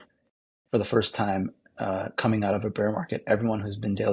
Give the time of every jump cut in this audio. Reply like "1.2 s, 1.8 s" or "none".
none